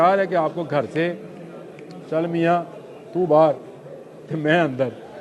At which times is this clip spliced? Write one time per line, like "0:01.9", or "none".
none